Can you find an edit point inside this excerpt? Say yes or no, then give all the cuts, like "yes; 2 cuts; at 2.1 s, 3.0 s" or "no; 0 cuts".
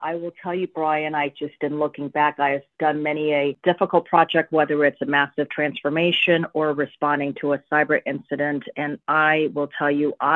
yes; 1 cut; at 3.6 s